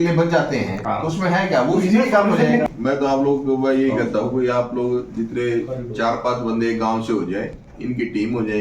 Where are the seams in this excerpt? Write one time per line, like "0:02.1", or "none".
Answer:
0:02.6